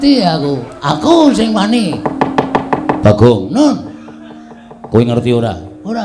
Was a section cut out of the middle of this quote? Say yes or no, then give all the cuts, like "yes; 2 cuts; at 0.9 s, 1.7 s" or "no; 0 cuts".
no; 0 cuts